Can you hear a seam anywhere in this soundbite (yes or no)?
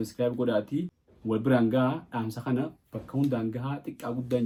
no